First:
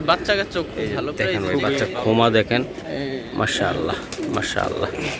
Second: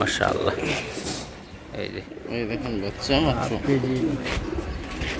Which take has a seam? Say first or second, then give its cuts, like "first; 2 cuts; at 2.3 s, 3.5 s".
first; 1 cut; at 1.8 s